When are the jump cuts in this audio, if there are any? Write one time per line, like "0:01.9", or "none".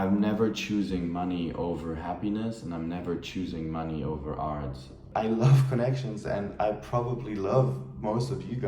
0:05.0